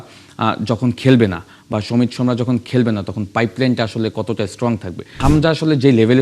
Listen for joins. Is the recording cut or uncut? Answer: cut